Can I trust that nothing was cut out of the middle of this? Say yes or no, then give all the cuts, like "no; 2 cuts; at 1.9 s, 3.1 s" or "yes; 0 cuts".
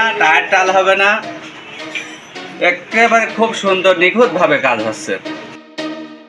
no; 1 cut; at 5.3 s